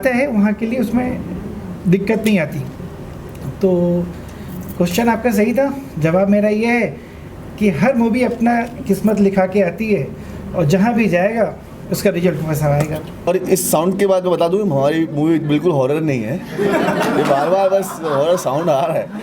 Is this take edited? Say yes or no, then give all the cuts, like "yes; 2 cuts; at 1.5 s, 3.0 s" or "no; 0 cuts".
yes; 1 cut; at 13.3 s